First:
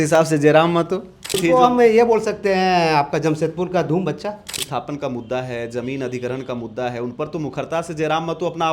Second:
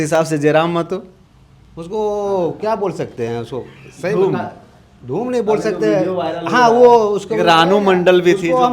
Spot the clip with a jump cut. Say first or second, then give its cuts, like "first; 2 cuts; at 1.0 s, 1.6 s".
first; 2 cuts; at 1.4 s, 4.7 s